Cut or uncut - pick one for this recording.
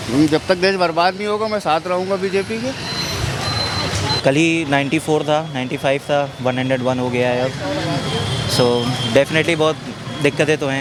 uncut